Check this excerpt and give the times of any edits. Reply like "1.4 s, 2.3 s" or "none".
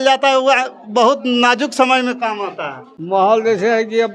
none